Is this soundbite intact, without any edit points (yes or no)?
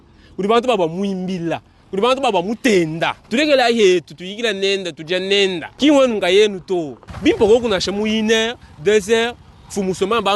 no